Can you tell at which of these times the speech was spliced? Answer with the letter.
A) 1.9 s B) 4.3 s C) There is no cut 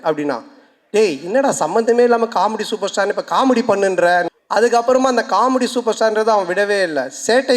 B